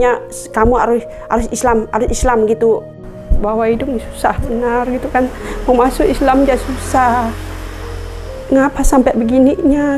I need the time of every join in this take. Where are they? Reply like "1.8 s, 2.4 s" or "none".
3.0 s

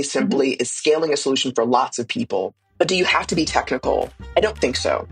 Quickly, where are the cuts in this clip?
2.6 s, 4.2 s

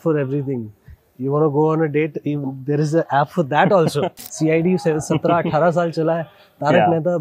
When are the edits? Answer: 4.2 s

